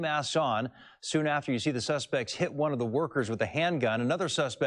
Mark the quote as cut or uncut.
cut